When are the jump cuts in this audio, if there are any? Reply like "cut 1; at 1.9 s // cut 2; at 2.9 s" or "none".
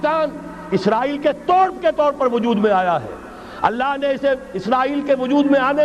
none